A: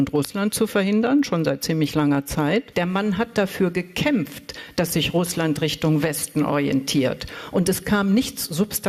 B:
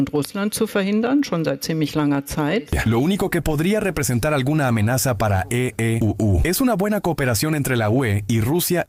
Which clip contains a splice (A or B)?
A